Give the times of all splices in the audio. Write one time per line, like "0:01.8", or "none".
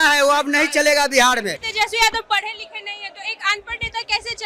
0:01.6